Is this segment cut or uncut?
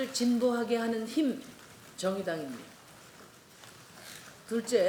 uncut